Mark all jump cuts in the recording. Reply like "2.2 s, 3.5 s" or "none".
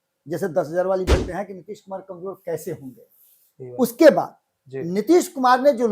1.1 s

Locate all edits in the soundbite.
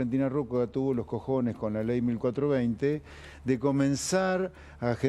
none

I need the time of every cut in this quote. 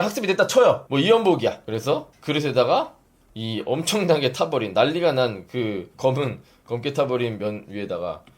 0.8 s, 1.7 s

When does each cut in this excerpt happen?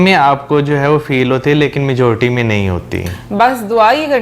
none

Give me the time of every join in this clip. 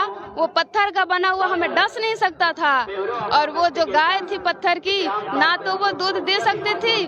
none

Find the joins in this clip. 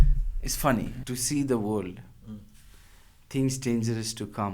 1.0 s

